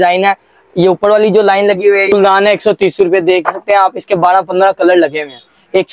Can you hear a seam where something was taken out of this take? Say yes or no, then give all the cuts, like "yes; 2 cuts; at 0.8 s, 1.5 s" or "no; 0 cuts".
yes; 1 cut; at 2.1 s